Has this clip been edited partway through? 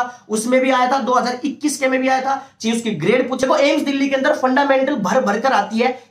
yes; 1 cut; at 3.4 s

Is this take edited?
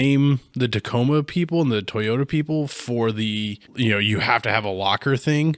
yes; 1 cut; at 3.6 s

